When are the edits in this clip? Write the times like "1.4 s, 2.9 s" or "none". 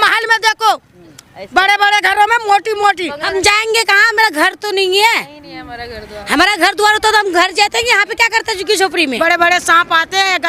3.2 s, 9.1 s

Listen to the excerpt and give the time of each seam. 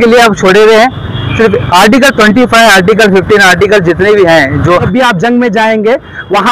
4.9 s

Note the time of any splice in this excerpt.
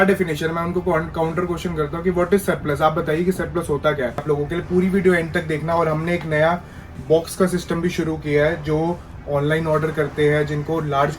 4.2 s

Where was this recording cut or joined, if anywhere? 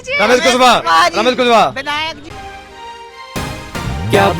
2.4 s

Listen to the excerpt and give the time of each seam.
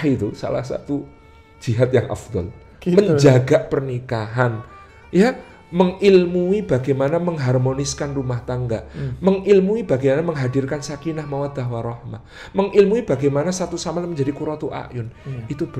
none

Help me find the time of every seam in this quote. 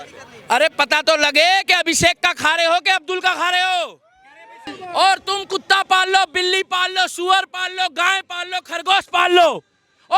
4.8 s

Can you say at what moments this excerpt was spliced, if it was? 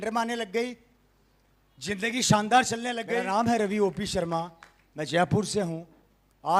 3.0 s

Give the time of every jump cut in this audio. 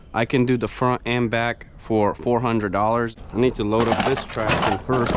3.1 s

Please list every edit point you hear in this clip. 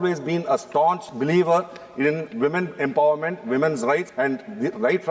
1.1 s, 4.1 s

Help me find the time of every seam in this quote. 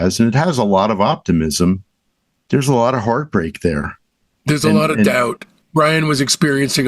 5.6 s

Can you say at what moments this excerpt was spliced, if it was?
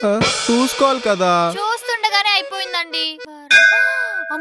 3.3 s

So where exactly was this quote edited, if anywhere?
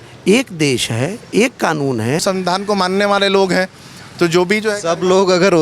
2.2 s

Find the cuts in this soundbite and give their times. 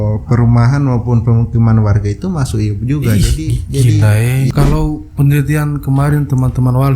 4.5 s

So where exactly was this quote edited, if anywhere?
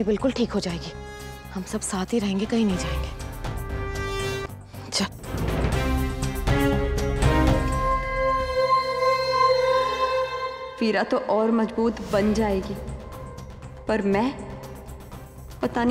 4.5 s, 7.6 s

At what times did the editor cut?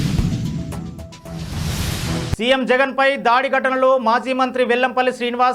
none

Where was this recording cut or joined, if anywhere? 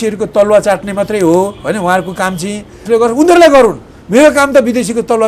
2.8 s

